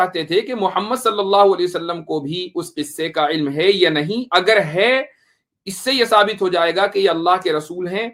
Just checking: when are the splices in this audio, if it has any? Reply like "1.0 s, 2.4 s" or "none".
none